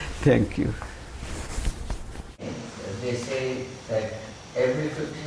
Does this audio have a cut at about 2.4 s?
yes; 1 cut; at 2.4 s

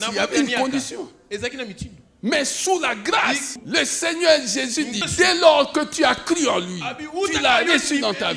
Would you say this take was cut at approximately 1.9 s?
no; 2 cuts; at 3.6 s, 5.0 s

